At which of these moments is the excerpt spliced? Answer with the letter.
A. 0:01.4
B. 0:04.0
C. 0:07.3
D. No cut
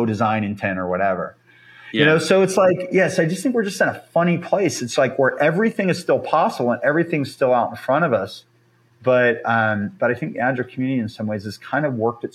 D